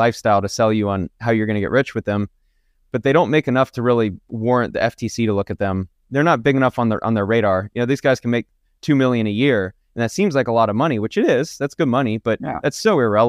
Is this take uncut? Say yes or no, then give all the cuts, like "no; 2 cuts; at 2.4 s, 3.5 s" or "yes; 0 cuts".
yes; 0 cuts